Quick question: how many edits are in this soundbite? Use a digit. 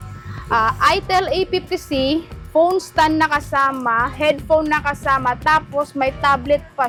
0